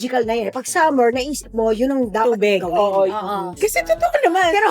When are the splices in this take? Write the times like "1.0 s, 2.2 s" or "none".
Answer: 3.5 s